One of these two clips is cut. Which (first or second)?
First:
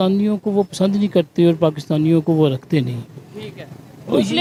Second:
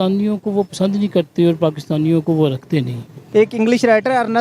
second